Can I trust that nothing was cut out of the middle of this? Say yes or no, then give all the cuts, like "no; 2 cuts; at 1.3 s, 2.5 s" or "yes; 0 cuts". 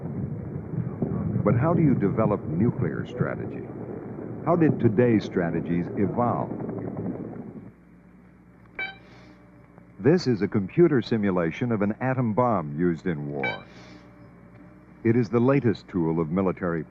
yes; 0 cuts